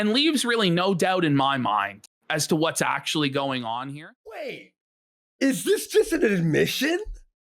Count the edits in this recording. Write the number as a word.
one